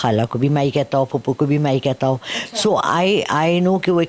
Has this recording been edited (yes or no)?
no